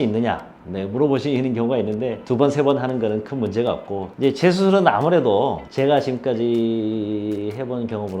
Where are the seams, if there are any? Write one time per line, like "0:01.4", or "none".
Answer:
0:02.2
0:04.2